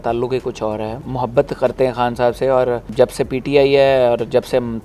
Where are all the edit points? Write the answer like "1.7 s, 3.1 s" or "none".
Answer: 1.0 s, 2.9 s